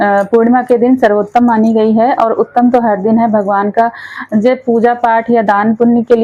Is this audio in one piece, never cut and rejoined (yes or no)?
yes